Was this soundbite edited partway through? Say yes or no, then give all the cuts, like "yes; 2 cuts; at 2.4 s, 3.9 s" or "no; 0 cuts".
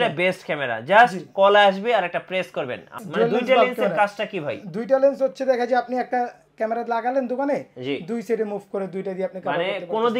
yes; 1 cut; at 3.0 s